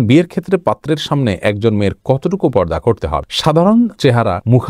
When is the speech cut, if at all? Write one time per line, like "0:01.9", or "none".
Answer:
none